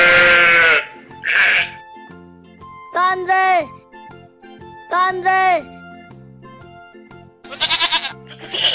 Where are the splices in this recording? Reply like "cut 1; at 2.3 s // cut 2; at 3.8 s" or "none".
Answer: cut 1; at 5.6 s // cut 2; at 7.5 s